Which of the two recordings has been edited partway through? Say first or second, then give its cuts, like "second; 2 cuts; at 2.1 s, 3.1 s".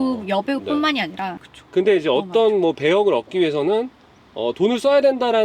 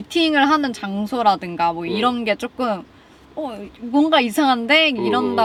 first; 1 cut; at 1.4 s